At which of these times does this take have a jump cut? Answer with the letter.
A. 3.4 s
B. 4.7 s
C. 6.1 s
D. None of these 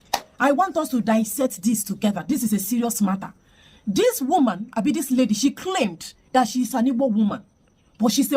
D